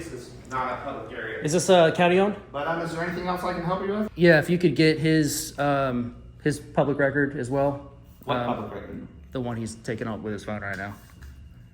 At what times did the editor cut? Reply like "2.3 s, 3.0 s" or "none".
2.5 s, 4.1 s